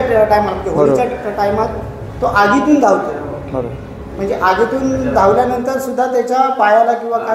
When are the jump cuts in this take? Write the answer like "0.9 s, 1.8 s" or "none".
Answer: none